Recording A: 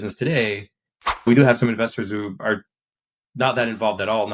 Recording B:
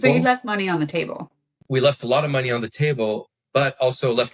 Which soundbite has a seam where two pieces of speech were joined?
A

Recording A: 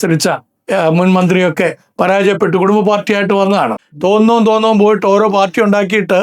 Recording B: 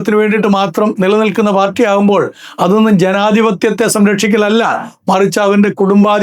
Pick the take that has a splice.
A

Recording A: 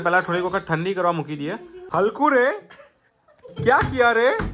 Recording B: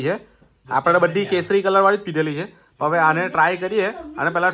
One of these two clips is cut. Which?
A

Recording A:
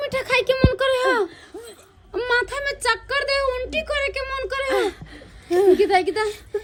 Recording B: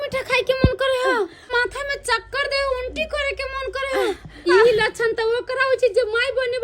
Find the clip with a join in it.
B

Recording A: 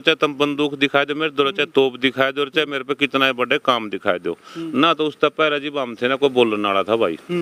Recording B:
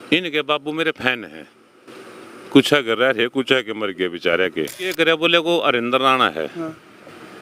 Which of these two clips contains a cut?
B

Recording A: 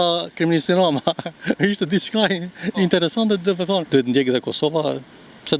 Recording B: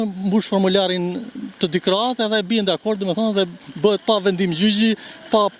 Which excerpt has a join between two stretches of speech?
A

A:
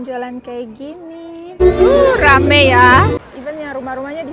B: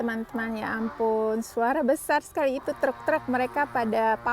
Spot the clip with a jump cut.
A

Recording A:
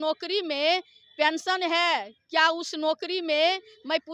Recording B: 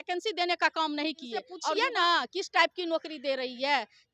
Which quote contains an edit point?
B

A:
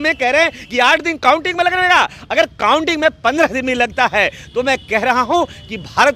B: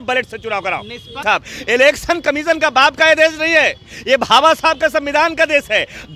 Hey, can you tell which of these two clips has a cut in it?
B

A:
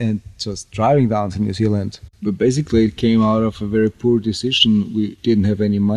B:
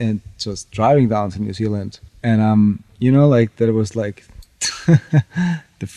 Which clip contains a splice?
A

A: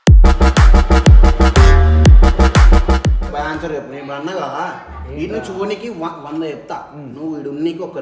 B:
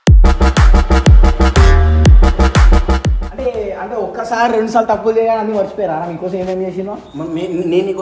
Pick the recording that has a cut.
B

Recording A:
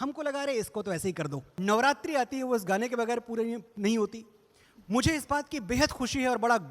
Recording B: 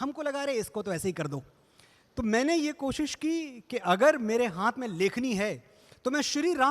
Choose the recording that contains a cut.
A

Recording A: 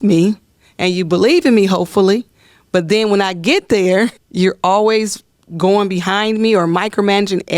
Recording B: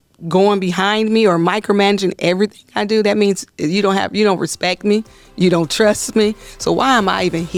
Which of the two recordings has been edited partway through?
A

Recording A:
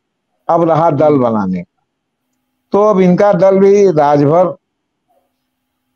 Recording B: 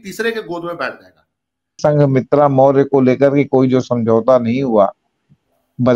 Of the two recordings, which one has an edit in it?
B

